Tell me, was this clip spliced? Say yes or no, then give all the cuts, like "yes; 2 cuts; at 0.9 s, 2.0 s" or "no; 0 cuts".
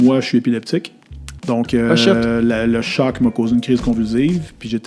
no; 0 cuts